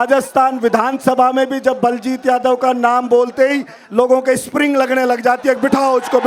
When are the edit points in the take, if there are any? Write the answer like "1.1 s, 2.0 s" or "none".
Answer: none